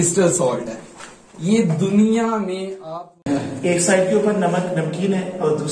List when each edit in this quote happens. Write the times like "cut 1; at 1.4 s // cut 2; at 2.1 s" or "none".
cut 1; at 3.2 s